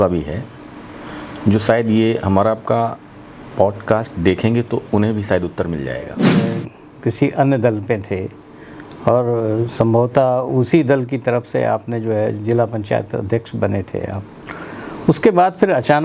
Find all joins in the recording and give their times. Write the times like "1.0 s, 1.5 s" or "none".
6.2 s